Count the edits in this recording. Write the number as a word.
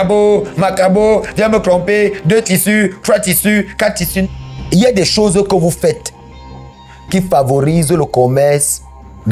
one